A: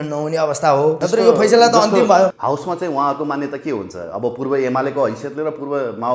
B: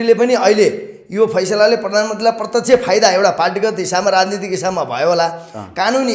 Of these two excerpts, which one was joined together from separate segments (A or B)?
A